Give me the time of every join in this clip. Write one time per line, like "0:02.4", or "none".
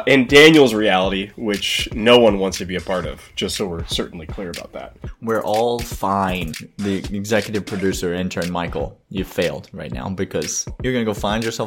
0:04.8
0:06.6
0:10.7